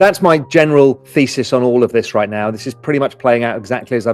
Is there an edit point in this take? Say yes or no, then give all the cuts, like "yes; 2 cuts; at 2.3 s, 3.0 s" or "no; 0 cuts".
yes; 1 cut; at 1.0 s